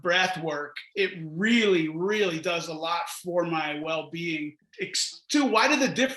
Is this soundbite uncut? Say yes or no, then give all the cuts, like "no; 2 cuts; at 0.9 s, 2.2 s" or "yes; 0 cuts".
no; 1 cut; at 4.6 s